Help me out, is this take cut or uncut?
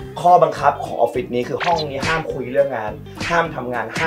cut